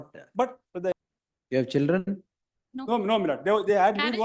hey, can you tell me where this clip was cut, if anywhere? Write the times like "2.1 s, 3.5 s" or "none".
1.0 s